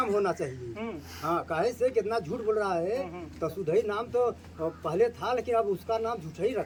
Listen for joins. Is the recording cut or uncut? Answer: uncut